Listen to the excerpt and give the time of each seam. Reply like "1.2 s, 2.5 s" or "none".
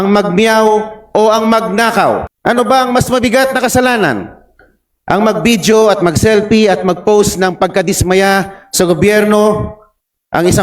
2.3 s